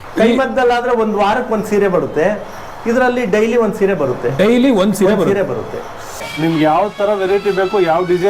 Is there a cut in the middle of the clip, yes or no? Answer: yes